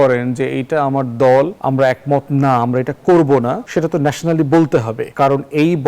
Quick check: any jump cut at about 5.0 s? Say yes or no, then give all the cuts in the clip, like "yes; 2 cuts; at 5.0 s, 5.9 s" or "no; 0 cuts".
yes; 3 cuts; at 1.6 s, 3.6 s, 5.0 s